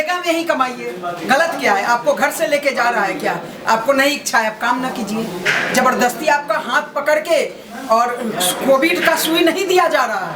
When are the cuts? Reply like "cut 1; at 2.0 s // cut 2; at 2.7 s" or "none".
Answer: none